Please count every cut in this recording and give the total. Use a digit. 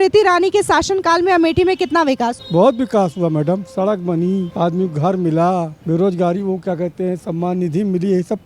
3